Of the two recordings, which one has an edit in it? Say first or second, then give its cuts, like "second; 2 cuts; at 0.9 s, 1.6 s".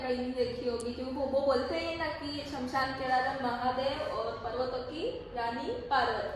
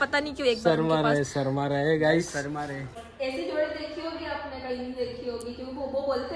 second; 1 cut; at 3.0 s